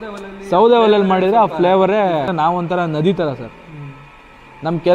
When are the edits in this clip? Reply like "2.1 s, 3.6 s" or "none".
2.3 s